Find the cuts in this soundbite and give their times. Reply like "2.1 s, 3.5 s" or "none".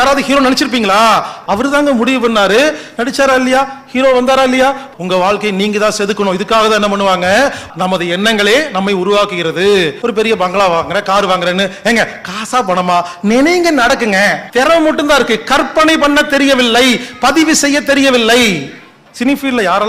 1.4 s, 4.9 s, 7.6 s, 10.0 s, 14.4 s, 19.0 s